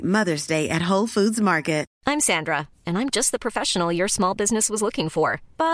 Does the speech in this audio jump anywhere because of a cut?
yes; 1 cut; at 1.9 s

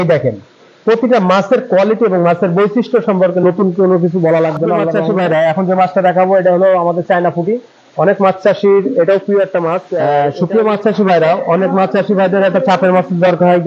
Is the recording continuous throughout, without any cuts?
no; 2 cuts; at 4.9 s, 10.0 s

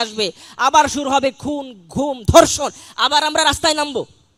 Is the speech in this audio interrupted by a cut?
no; 0 cuts

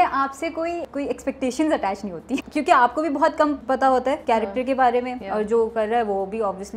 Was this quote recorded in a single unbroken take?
no; 4 cuts; at 0.9 s, 2.3 s, 4.1 s, 5.2 s

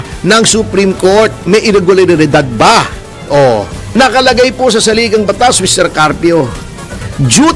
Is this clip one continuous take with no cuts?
no; 1 cut; at 3.8 s

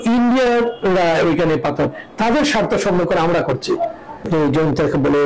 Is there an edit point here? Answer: yes; 1 cut; at 4.3 s

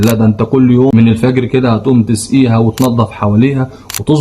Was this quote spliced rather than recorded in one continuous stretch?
yes; 1 cut; at 0.9 s

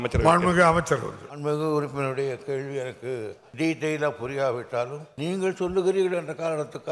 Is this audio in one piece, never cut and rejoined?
no; 3 cuts; at 1.2 s, 3.4 s, 5.1 s

